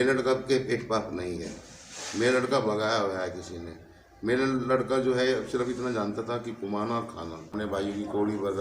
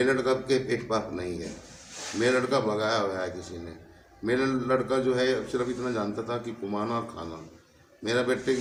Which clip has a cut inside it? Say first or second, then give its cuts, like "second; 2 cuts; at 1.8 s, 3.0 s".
first; 1 cut; at 7.5 s